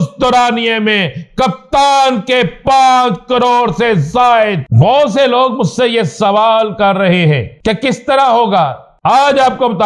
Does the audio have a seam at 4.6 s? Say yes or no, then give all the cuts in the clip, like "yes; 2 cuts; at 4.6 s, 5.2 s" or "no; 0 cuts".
yes; 3 cuts; at 4.6 s, 7.5 s, 8.9 s